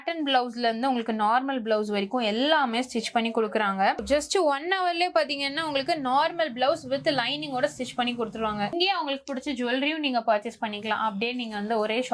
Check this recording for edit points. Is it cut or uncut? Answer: cut